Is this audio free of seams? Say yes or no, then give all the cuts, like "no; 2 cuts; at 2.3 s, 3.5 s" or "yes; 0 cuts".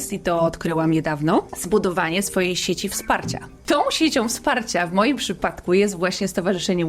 no; 2 cuts; at 1.6 s, 3.6 s